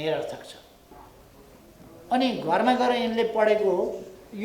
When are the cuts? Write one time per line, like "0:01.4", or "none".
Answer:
0:00.9